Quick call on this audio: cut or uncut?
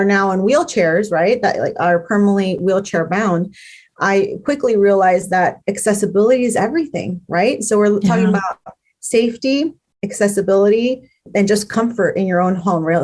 uncut